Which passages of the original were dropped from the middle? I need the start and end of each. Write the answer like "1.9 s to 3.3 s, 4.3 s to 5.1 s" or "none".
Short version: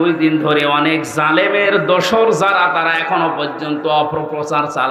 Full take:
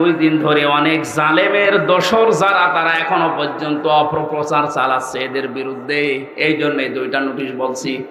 none